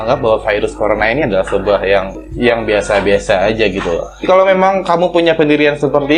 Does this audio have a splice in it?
yes; 1 cut; at 4.2 s

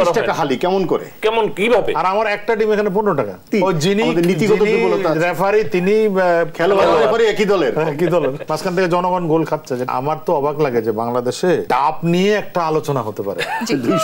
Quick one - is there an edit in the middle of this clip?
yes; 4 cuts; at 3.5 s, 8.4 s, 9.9 s, 11.6 s

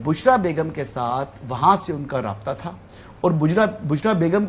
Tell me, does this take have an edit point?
no; 0 cuts

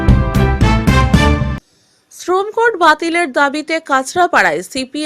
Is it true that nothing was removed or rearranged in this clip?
no; 1 cut; at 1.6 s

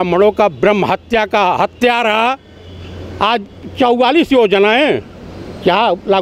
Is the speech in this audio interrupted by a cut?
no; 0 cuts

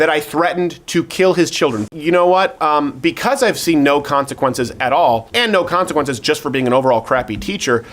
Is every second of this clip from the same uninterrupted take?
no; 2 cuts; at 1.8 s, 5.3 s

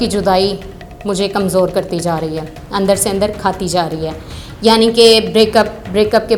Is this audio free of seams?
yes; 0 cuts

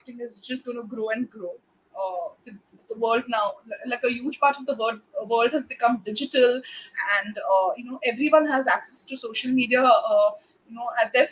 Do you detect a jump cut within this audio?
no; 0 cuts

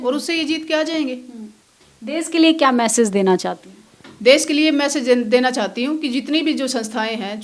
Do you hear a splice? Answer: no; 0 cuts

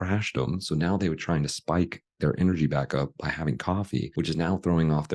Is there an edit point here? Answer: yes; 1 cut; at 4.1 s

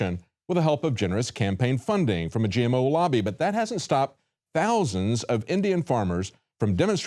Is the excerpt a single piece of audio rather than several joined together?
no; 1 cut; at 4.3 s

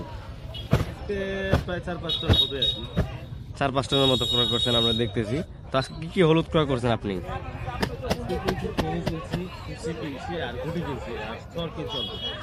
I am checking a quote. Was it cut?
no; 0 cuts

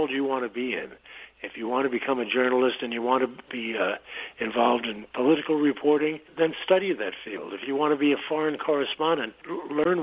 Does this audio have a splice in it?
no; 0 cuts

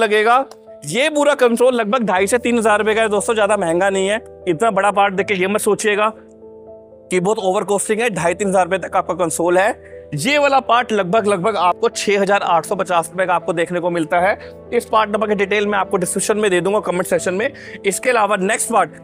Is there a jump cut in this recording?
no; 0 cuts

